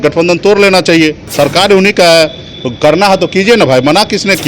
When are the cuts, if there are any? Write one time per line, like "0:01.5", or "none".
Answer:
0:01.3